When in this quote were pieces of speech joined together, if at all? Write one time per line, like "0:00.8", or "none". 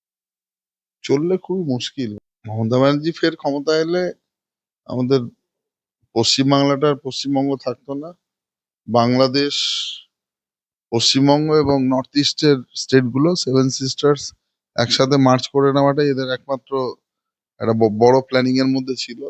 0:02.1